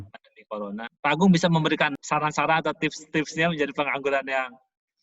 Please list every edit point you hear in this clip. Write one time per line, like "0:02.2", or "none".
0:00.9
0:02.0

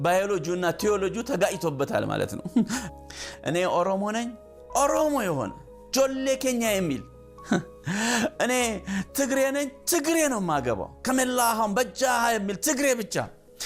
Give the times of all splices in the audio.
0:02.9

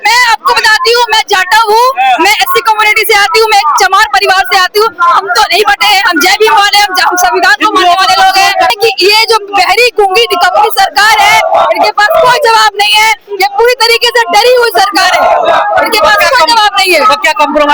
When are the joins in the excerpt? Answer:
0:08.7

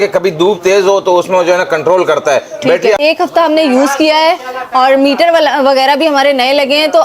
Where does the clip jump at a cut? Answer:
0:03.0

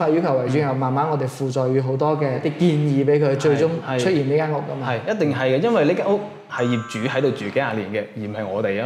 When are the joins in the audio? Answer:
0:02.4
0:03.8

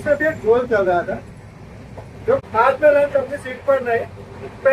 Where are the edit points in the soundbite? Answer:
0:02.4

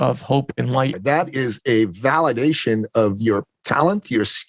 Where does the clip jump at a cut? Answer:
0:01.0

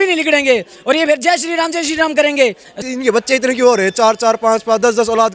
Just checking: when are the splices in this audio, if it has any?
0:02.8

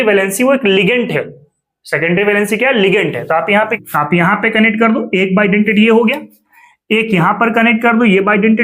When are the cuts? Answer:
0:03.8

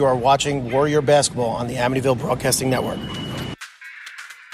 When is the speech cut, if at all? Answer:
0:03.6

